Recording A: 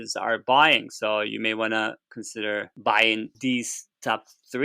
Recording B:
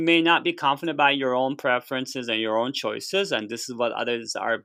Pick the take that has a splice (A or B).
A